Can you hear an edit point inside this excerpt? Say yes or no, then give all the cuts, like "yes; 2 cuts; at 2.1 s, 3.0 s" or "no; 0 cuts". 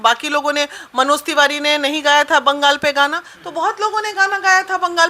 no; 0 cuts